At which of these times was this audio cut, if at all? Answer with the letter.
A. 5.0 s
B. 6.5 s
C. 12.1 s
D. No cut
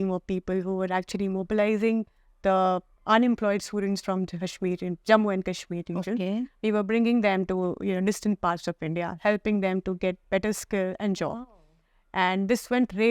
D